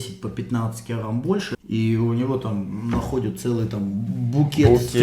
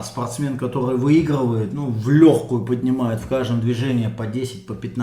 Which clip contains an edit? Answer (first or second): first